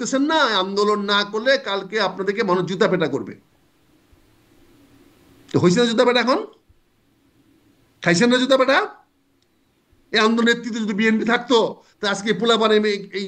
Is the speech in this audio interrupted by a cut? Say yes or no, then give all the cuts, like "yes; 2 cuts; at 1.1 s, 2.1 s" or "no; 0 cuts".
no; 0 cuts